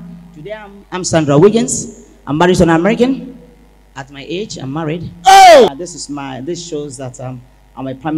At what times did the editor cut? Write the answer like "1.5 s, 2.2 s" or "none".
5.7 s